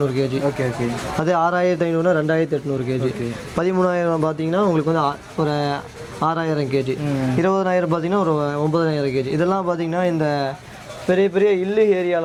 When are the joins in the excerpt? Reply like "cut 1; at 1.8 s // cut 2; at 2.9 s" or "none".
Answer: none